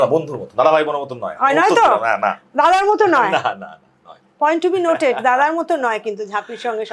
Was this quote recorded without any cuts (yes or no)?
yes